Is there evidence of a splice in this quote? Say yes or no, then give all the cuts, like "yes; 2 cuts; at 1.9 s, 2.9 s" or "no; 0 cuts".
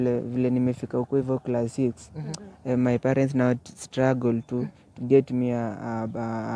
no; 0 cuts